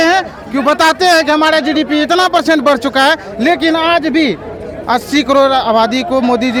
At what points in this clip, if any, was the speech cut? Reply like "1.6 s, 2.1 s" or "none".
none